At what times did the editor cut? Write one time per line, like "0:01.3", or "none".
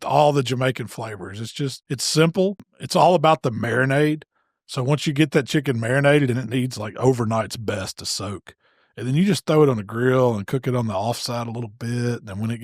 0:01.8
0:02.7